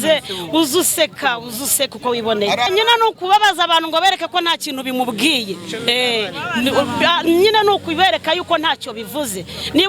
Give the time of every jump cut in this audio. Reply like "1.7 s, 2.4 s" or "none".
2.7 s

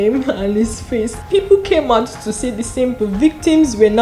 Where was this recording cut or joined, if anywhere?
1.2 s, 3.0 s

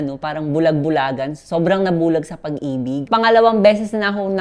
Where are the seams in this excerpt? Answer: 3.1 s

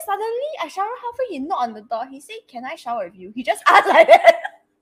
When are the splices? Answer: 3.2 s

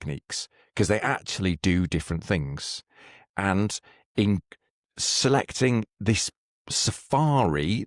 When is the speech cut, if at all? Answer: none

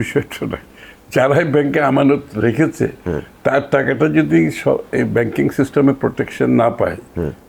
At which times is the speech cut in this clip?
none

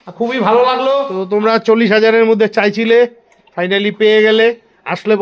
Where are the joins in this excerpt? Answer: 1.2 s

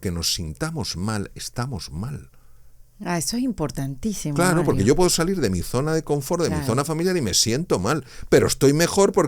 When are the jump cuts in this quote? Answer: none

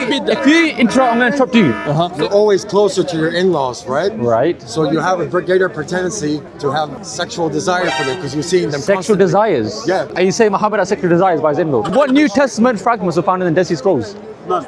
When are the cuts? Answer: 2.1 s, 6.7 s, 10.1 s, 11.9 s

